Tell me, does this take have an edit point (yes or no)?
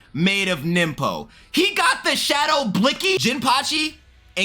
yes